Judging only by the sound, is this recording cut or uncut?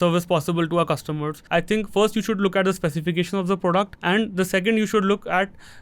cut